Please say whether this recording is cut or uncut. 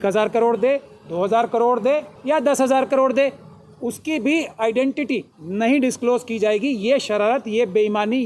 cut